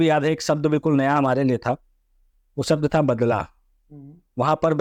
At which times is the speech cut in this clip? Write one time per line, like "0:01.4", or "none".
none